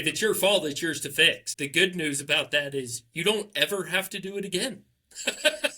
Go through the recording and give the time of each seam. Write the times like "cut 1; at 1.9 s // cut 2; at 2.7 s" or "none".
cut 1; at 1.5 s